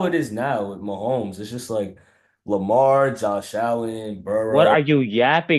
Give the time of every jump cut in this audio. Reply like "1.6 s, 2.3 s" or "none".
none